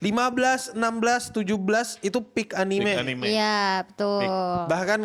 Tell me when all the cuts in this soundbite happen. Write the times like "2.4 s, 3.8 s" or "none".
none